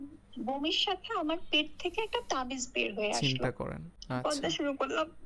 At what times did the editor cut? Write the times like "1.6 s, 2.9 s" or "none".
3.9 s